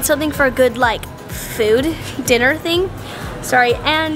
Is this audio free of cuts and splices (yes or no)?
yes